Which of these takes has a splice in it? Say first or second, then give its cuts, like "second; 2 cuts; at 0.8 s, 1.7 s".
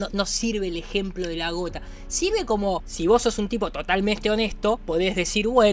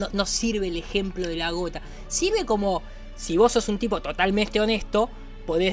first; 2 cuts; at 2.9 s, 4.8 s